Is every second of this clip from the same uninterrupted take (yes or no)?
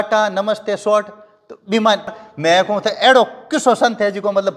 no